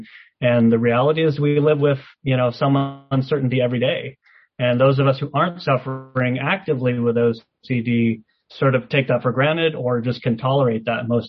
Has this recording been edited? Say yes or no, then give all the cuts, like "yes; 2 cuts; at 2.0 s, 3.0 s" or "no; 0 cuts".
no; 0 cuts